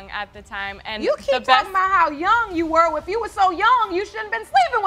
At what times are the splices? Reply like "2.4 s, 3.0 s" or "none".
none